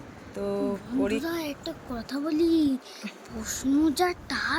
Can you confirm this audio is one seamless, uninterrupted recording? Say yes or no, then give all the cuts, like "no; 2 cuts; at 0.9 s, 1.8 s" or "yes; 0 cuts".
yes; 0 cuts